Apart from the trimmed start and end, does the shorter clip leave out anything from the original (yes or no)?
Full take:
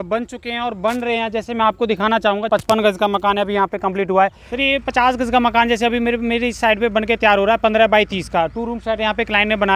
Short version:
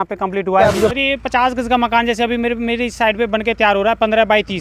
no